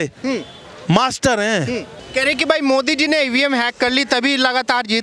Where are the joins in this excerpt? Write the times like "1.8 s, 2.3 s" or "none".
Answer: 1.9 s